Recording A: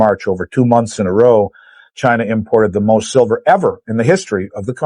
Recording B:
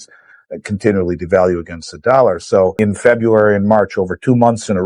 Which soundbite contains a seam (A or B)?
B